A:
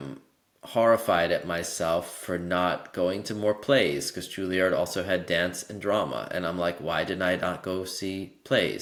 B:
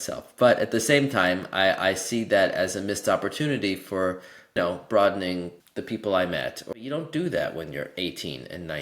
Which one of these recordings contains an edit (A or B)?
B